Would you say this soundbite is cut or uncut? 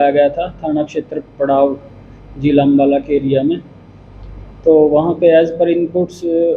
uncut